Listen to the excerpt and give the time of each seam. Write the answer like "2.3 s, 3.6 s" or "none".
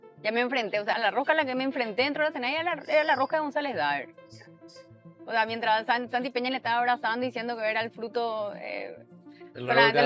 0.9 s